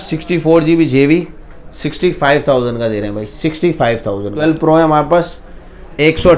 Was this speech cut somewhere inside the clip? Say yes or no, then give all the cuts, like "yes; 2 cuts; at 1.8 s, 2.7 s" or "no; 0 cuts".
yes; 1 cut; at 4.3 s